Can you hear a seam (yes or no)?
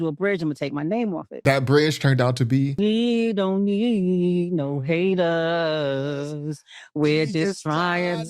yes